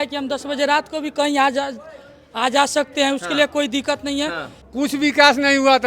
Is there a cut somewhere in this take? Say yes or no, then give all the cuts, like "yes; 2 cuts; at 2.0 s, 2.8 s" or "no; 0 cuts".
yes; 1 cut; at 4.5 s